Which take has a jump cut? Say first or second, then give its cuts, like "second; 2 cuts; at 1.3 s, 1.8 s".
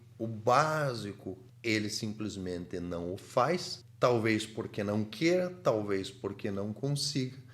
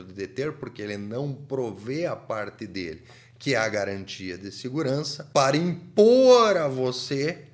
first; 1 cut; at 1.4 s